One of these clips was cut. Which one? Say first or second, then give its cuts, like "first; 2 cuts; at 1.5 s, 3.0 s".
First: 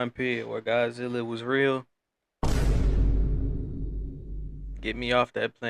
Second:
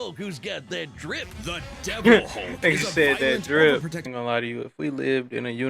second; 1 cut; at 4.1 s